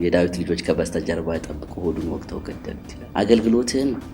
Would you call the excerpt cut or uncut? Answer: cut